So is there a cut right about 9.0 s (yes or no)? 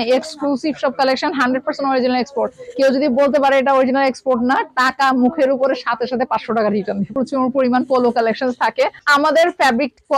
yes